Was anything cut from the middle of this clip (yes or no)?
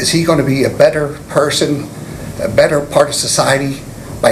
no